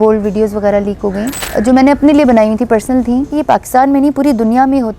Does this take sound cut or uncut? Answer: cut